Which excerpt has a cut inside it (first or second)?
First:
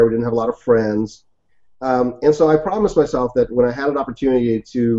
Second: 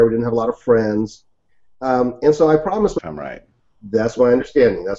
first